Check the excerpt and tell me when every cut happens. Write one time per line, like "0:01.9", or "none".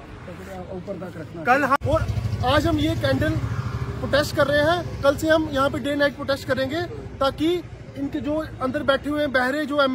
0:01.8